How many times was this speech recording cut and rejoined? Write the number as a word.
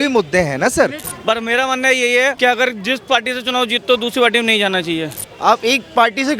three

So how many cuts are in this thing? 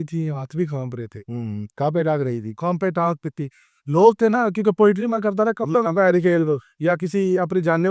zero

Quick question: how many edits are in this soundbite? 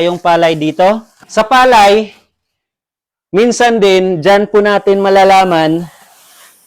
one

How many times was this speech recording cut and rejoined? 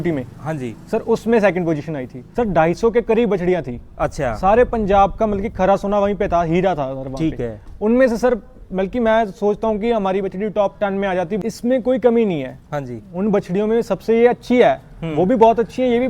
two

